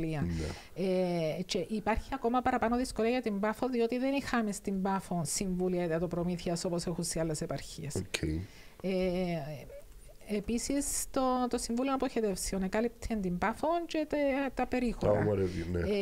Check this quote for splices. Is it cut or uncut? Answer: uncut